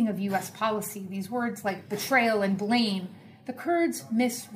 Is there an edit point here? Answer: yes; 1 cut; at 2.5 s

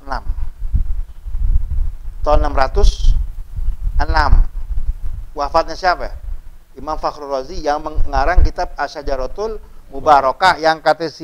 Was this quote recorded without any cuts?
yes; 0 cuts

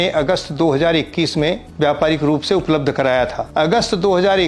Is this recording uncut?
no; 2 cuts; at 1.7 s, 3.4 s

